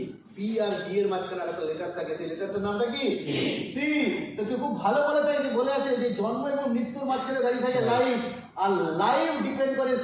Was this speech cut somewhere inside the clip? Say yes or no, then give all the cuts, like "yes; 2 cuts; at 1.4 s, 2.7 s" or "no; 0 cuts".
yes; 1 cut; at 3.3 s